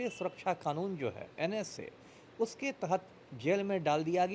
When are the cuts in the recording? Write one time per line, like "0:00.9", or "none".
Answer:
none